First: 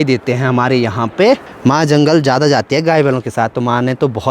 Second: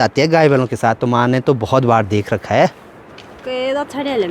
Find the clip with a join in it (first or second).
first